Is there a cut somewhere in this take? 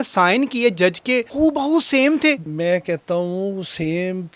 yes; 2 cuts; at 1.3 s, 2.5 s

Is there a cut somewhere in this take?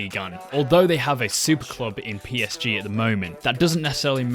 no; 0 cuts

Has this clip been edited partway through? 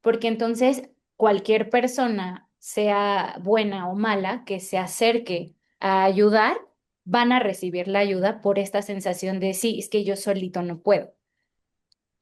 no; 0 cuts

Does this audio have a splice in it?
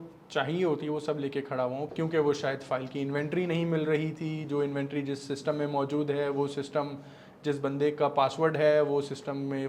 yes; 1 cut; at 1.9 s

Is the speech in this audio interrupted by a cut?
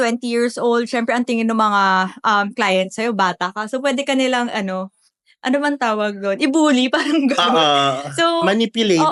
no; 0 cuts

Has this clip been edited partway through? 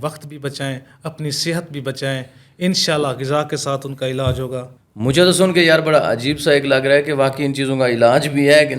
no; 0 cuts

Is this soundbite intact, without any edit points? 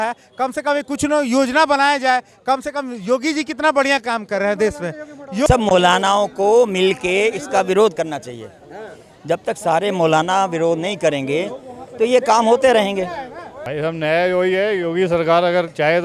no; 2 cuts; at 5.5 s, 13.5 s

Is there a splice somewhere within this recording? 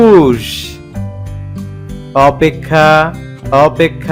no; 0 cuts

